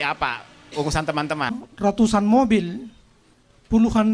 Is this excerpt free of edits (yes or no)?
no